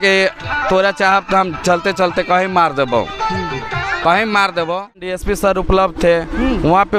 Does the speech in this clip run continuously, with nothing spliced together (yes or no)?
no